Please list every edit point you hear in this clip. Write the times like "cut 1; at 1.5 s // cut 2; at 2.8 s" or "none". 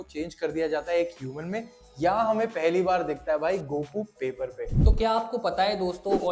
cut 1; at 4.6 s